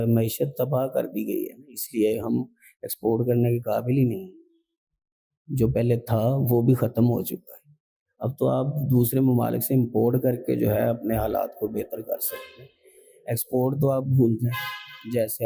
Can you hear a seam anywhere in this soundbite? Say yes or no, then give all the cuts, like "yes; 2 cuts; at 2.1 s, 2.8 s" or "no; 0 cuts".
no; 0 cuts